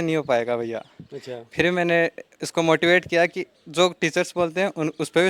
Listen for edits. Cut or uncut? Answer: uncut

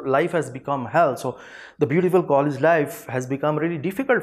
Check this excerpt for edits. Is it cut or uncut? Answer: uncut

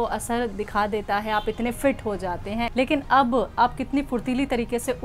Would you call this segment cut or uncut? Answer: cut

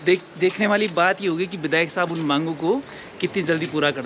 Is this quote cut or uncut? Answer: uncut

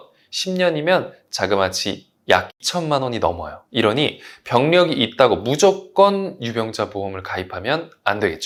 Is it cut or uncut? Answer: uncut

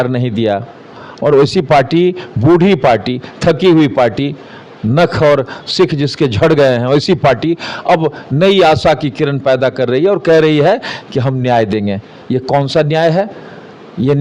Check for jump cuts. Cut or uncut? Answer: uncut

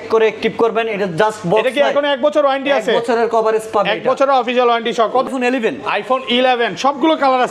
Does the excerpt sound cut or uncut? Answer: cut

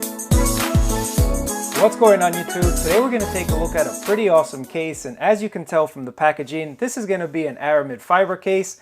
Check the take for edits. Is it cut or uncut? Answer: cut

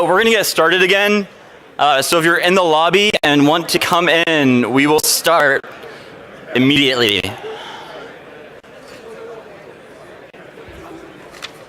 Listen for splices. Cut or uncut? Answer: uncut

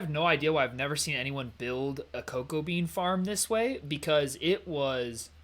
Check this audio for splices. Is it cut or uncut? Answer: uncut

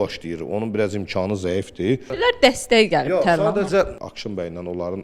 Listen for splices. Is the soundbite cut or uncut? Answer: cut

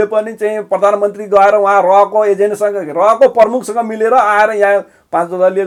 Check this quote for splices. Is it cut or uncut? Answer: uncut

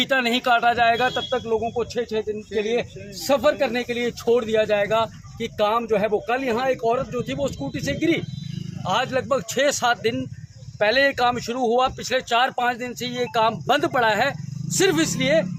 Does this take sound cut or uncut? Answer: uncut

